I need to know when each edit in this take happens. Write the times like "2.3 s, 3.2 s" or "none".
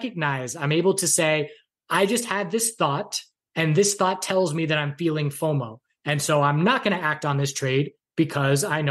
none